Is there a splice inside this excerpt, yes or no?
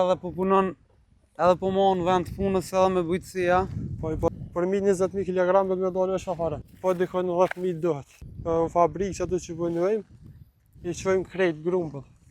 yes